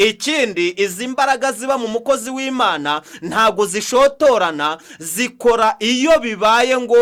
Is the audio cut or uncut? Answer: uncut